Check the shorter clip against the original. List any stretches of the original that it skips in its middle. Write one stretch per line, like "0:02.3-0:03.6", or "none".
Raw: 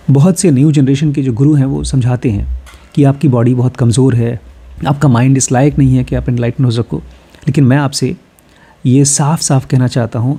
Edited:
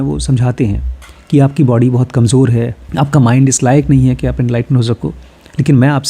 0:04.4-0:04.7